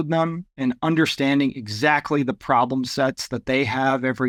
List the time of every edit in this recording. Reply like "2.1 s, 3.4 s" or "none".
none